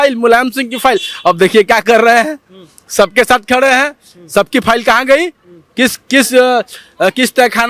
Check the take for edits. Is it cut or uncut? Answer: uncut